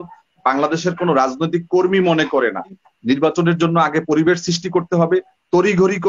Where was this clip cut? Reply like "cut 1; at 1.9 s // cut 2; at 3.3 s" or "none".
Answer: cut 1; at 2.8 s